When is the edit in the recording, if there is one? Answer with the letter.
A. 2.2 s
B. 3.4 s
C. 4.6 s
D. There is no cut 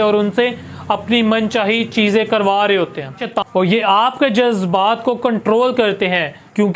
B